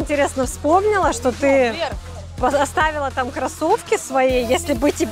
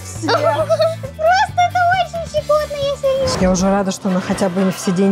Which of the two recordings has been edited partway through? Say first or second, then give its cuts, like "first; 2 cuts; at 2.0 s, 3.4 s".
second; 1 cut; at 3.4 s